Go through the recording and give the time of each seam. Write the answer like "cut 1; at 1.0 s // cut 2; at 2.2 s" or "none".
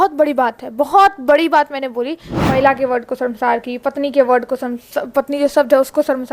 cut 1; at 2.3 s